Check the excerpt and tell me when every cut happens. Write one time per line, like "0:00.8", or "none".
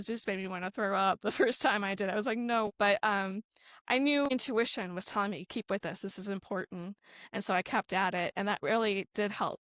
0:02.7
0:04.3